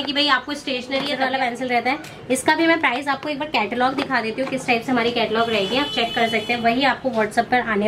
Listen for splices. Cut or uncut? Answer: cut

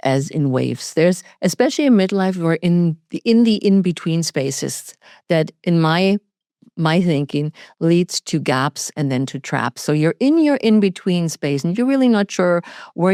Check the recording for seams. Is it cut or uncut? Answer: uncut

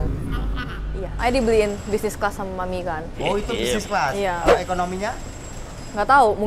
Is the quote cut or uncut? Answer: cut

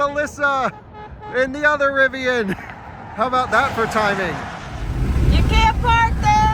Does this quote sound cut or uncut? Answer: cut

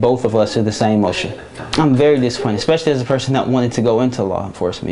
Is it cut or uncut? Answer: cut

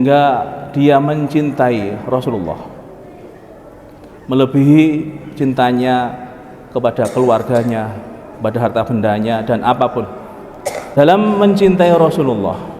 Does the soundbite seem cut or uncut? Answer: cut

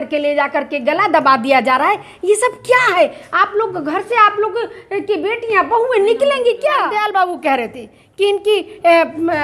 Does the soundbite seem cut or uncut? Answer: cut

